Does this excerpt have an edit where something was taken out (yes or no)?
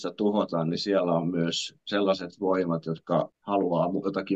yes